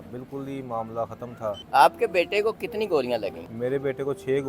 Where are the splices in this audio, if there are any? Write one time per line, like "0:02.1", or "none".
0:01.6
0:03.4